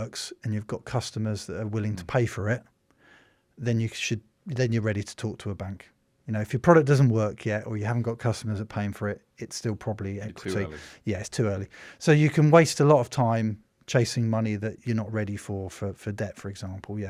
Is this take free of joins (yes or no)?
yes